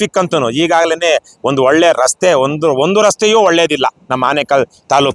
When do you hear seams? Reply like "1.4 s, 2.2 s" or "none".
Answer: none